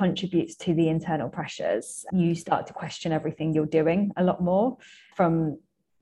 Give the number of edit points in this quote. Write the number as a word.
two